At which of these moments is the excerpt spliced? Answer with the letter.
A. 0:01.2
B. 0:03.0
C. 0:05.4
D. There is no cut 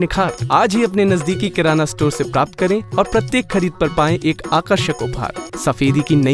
C